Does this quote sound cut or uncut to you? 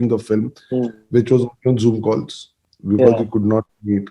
uncut